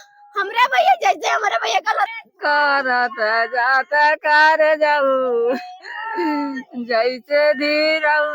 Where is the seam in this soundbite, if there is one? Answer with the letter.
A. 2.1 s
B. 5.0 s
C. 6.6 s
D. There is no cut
A